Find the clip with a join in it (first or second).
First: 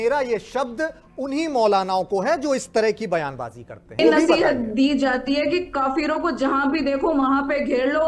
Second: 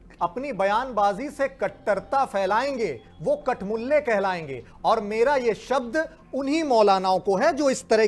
first